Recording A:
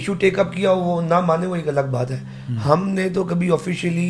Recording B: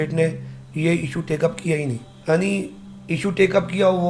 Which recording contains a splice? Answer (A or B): B